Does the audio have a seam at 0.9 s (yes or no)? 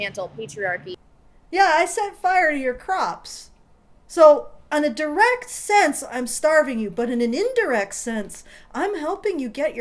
yes